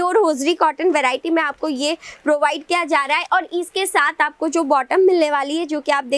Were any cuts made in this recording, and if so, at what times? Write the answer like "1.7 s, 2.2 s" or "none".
none